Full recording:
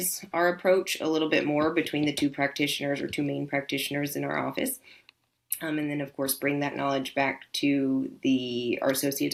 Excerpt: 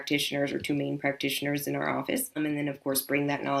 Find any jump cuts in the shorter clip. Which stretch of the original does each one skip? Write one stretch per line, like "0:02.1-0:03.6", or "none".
0:04.8-0:05.6